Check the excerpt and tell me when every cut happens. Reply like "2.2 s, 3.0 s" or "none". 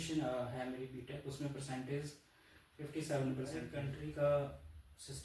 3.8 s